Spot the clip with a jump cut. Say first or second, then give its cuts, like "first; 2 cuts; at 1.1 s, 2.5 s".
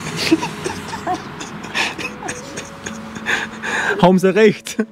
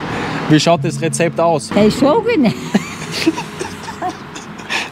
second; 1 cut; at 1.7 s